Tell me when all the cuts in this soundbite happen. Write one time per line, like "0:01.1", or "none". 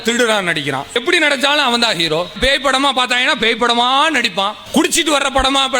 0:00.9
0:02.4
0:04.6